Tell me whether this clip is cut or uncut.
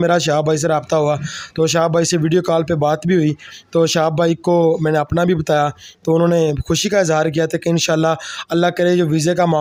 uncut